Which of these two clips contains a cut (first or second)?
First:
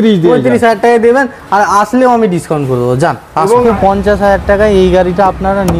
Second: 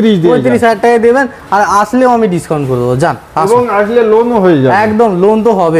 first